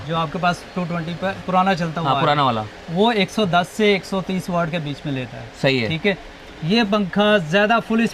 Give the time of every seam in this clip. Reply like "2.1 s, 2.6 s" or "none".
none